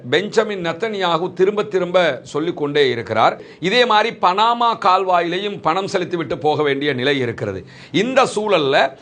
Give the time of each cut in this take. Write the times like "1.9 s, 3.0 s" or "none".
3.5 s